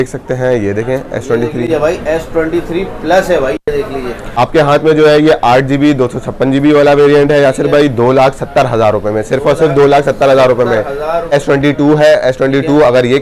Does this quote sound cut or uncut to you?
cut